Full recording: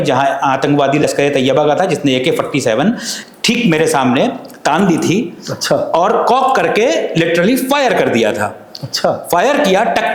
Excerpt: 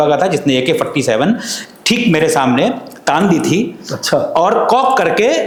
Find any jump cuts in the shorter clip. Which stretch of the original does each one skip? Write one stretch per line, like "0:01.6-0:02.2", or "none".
none